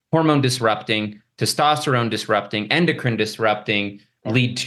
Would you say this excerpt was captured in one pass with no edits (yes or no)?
yes